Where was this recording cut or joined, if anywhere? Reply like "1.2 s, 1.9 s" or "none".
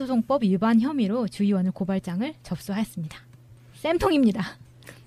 none